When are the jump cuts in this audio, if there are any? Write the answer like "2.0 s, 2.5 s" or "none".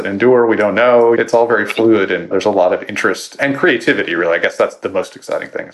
1.2 s, 2.3 s, 3.4 s, 4.8 s